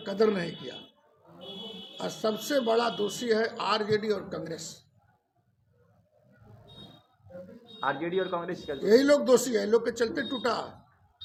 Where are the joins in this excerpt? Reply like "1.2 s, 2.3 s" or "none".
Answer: none